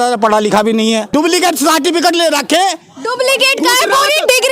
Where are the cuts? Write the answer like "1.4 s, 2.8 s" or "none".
1.1 s